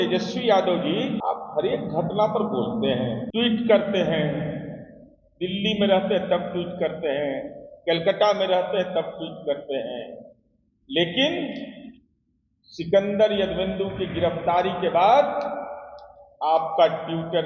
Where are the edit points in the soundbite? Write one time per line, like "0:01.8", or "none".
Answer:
0:01.2
0:03.2

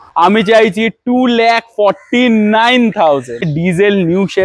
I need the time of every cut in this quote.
0:03.4

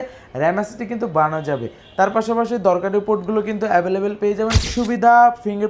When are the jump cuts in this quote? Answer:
0:04.6

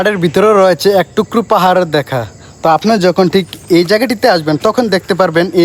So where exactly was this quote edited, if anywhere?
none

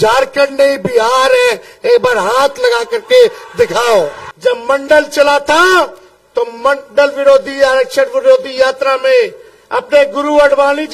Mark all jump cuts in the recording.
0:04.2

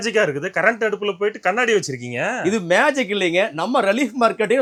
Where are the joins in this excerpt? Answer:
none

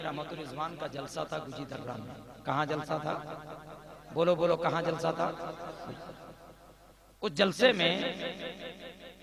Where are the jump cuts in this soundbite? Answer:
none

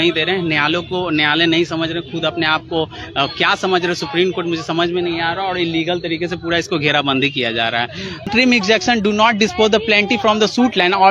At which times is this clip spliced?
0:08.3

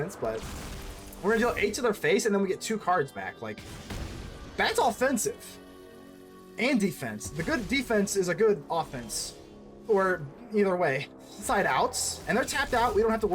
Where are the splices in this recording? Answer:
0:11.4

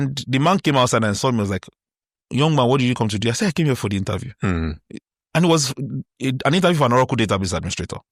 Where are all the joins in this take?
none

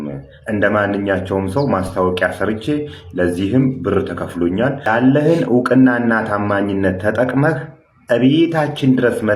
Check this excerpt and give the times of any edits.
0:04.9

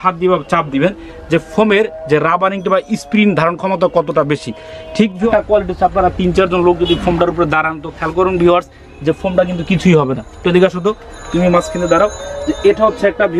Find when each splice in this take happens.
0:05.3

